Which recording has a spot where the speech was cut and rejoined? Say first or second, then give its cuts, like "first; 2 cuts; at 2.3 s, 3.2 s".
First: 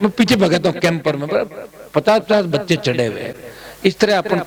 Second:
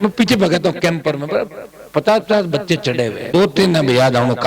second; 1 cut; at 3.3 s